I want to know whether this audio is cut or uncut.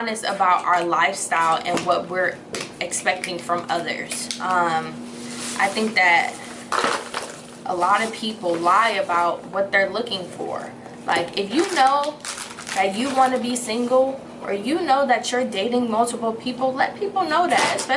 uncut